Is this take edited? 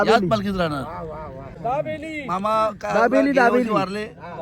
yes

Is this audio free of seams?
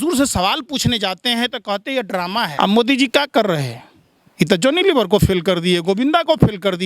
no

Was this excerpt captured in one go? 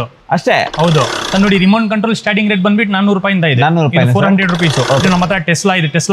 no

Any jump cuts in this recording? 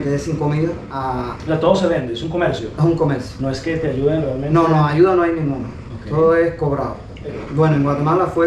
yes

